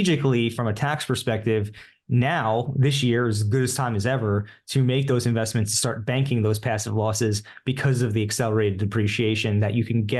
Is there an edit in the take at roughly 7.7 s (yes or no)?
no